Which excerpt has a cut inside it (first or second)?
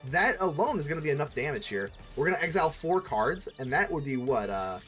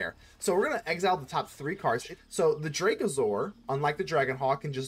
second